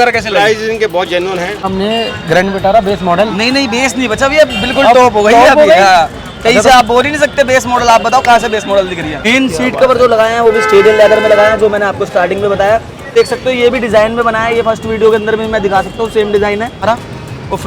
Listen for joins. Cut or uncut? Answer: cut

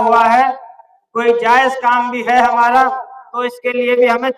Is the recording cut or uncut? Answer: uncut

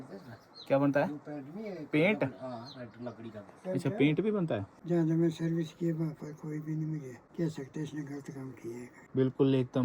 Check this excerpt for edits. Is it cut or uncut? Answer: cut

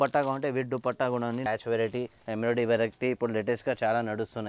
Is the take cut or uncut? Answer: cut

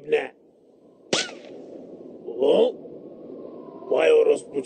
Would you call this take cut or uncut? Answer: uncut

